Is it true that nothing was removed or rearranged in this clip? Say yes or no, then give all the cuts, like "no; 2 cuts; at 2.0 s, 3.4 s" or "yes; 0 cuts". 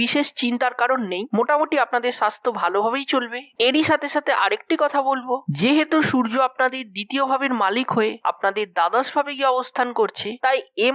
no; 1 cut; at 3.5 s